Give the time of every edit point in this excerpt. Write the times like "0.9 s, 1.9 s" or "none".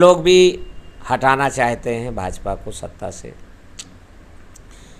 none